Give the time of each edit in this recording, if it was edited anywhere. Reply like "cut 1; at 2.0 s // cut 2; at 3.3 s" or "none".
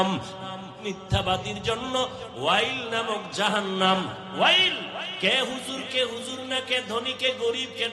cut 1; at 5.1 s

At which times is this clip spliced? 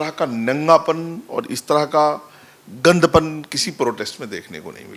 none

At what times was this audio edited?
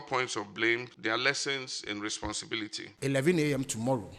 cut 1; at 0.9 s // cut 2; at 2.5 s

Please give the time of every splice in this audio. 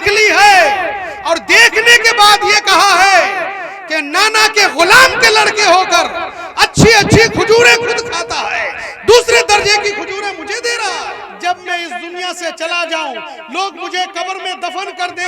cut 1; at 11.3 s

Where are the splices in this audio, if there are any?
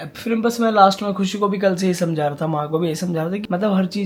none

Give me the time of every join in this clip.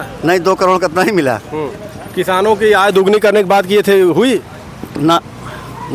none

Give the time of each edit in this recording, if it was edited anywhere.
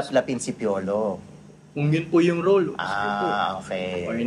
none

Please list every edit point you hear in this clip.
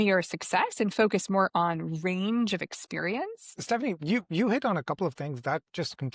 cut 1; at 3.4 s

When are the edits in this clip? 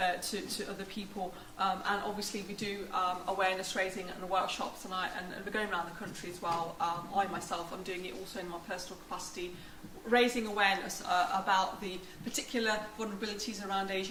none

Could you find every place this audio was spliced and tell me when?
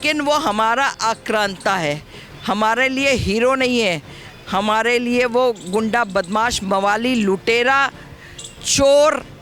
none

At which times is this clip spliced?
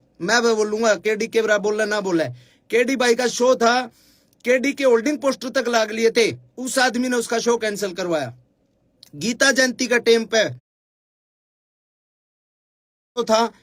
none

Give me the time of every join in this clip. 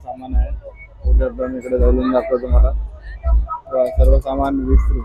none

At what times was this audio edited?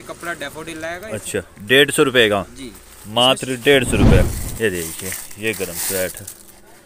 cut 1; at 4.3 s

